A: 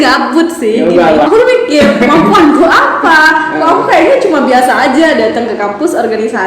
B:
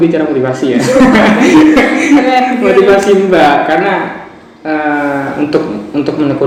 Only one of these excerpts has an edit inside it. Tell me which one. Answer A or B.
A